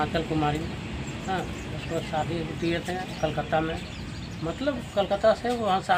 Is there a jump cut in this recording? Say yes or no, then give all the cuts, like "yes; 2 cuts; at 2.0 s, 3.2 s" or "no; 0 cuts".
no; 0 cuts